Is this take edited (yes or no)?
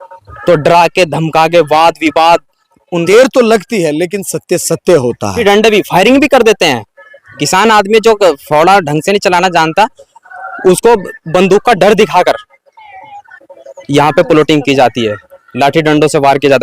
yes